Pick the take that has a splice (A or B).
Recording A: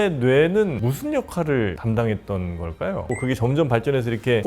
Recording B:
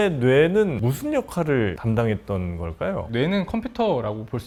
A